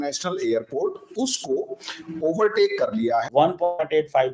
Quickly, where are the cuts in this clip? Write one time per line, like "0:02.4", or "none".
0:03.3